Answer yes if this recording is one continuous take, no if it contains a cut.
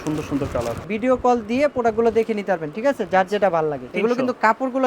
no